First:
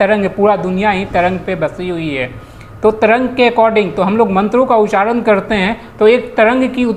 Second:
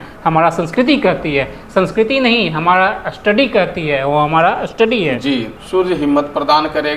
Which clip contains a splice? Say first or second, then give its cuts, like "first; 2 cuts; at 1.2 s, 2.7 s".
second; 1 cut; at 5.5 s